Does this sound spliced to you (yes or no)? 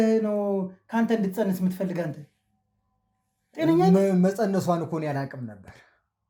no